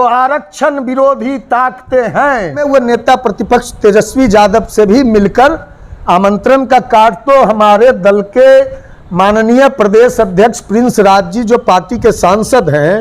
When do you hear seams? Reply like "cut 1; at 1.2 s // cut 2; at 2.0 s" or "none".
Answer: cut 1; at 2.7 s